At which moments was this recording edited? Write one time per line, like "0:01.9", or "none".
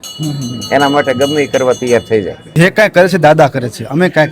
0:02.4